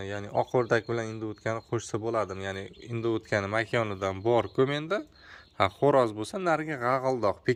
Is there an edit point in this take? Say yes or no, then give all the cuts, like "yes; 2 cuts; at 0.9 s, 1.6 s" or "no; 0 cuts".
no; 0 cuts